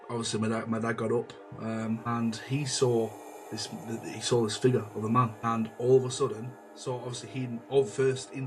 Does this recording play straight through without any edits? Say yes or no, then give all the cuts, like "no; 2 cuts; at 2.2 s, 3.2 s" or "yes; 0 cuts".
yes; 0 cuts